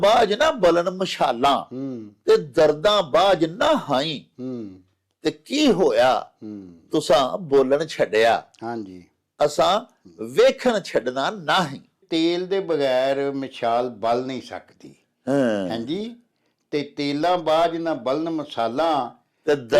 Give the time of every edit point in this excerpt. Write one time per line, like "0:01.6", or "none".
0:12.0